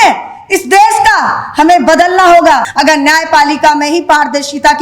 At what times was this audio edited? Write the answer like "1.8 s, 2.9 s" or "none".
2.7 s